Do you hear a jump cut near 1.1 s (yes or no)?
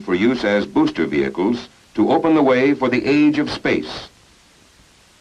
yes